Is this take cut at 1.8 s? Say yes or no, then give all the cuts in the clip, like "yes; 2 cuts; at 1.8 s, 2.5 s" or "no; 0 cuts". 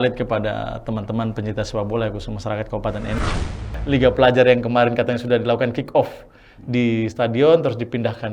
no; 1 cut; at 3.6 s